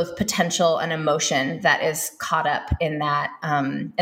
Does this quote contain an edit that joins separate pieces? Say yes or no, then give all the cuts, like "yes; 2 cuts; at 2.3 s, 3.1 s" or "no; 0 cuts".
no; 0 cuts